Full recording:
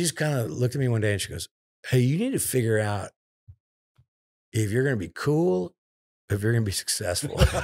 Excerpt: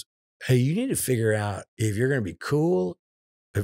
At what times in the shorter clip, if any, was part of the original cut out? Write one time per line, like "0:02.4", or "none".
0:01.1